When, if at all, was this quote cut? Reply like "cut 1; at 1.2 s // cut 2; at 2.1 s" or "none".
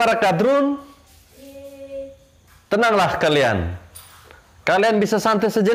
none